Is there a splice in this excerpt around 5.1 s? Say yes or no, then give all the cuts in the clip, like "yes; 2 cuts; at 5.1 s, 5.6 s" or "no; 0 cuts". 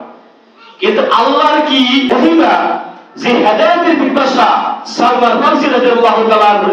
no; 1 cut; at 2.1 s